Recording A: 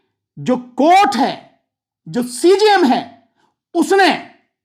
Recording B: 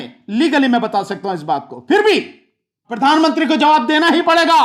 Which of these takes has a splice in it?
B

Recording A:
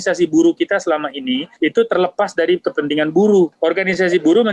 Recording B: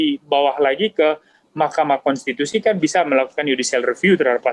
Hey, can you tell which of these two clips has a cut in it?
A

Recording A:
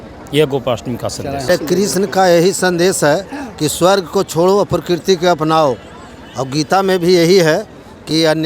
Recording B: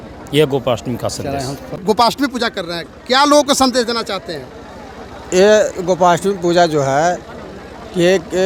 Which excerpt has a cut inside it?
A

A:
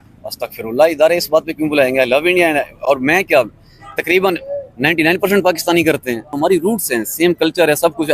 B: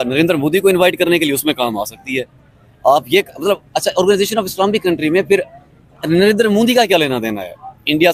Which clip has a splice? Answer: A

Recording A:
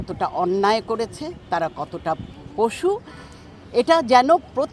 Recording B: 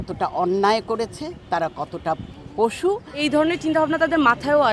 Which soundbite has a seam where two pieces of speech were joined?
B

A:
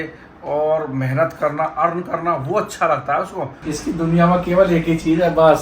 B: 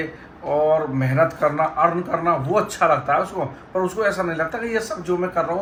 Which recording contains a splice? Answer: A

